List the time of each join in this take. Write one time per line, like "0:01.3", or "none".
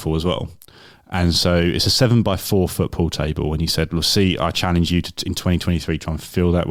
none